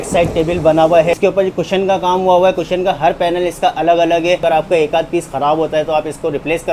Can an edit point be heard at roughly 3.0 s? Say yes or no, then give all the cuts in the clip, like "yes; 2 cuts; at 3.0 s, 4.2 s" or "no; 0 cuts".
no; 2 cuts; at 1.1 s, 4.4 s